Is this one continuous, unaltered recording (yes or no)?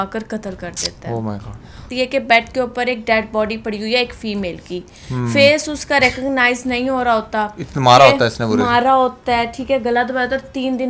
no